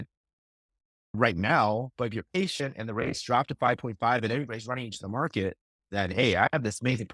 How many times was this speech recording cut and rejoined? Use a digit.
0